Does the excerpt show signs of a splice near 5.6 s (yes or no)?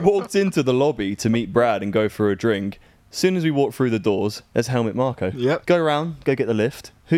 yes